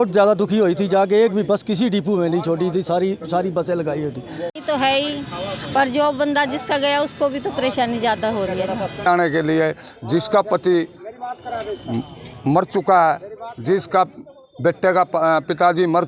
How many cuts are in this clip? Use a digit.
2